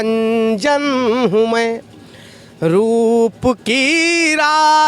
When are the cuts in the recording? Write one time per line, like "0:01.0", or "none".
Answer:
none